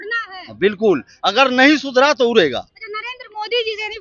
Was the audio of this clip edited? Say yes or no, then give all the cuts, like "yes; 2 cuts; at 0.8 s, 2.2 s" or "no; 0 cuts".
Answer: no; 0 cuts